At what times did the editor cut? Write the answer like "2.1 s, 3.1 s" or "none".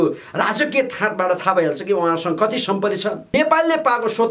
3.3 s